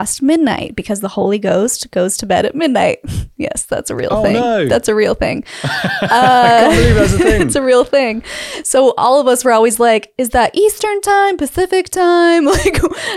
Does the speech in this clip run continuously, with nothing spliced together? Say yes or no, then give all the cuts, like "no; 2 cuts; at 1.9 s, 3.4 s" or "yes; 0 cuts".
yes; 0 cuts